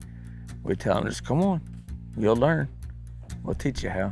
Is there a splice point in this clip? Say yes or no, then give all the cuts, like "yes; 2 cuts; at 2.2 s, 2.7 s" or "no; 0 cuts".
yes; 1 cut; at 2.8 s